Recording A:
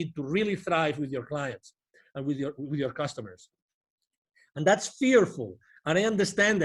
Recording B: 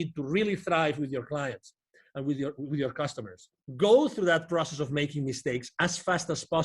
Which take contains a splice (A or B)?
B